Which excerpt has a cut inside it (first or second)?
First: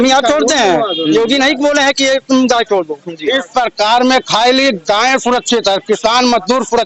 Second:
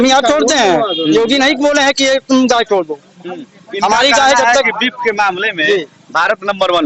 first